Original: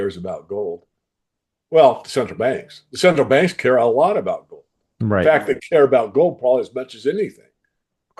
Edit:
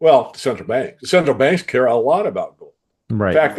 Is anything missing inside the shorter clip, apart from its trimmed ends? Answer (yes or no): yes